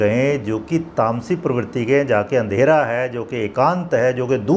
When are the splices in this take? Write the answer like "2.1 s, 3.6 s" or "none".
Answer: none